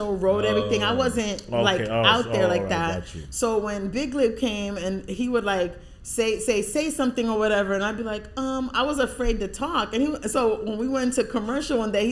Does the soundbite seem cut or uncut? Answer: uncut